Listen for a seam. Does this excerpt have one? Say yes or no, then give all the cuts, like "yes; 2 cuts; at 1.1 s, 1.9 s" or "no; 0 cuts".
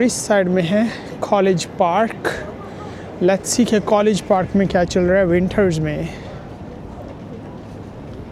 no; 0 cuts